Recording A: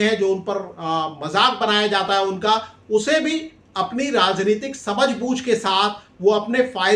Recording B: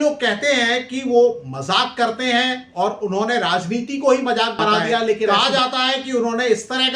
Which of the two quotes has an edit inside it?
B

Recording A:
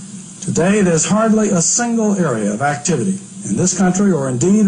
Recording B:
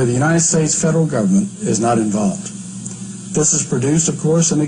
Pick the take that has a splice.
B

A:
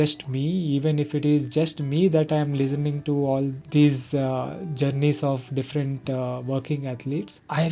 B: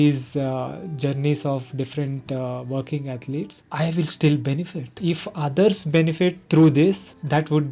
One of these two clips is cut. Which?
B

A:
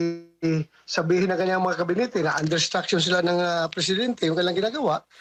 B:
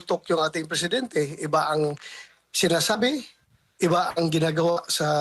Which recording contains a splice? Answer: B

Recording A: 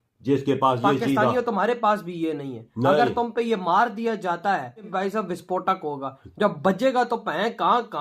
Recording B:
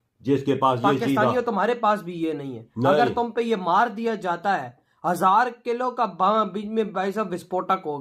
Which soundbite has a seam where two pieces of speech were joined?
A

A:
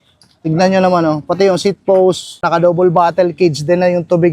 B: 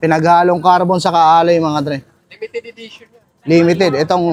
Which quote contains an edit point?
A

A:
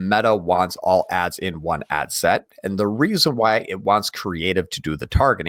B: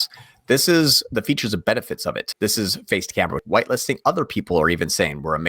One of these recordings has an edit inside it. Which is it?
B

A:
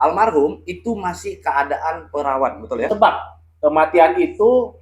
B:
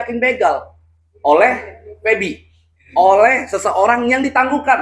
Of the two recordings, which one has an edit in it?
A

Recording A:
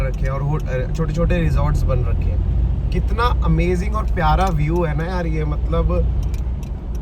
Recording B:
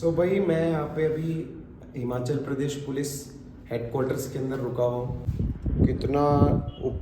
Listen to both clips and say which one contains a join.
B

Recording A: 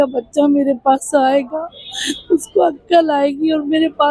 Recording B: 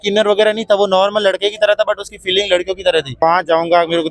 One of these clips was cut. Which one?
B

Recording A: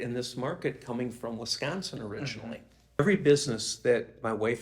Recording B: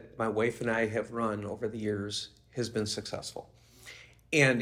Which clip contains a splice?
A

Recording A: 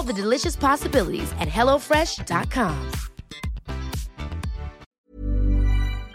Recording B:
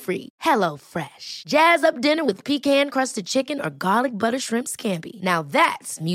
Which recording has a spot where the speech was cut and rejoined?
A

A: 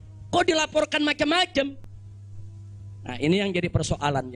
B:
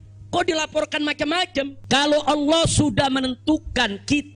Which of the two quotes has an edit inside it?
B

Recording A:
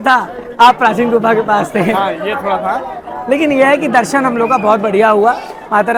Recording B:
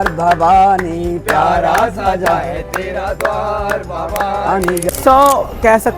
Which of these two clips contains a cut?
B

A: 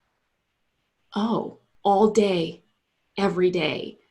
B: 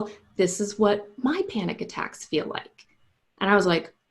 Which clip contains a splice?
A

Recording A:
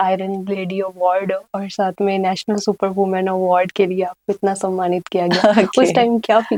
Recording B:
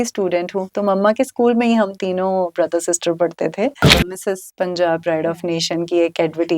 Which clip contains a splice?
B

